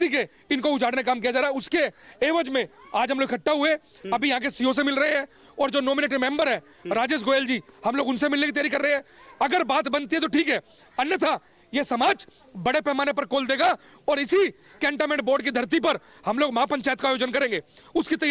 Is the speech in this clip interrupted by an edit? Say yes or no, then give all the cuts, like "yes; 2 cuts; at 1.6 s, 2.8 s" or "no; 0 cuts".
no; 0 cuts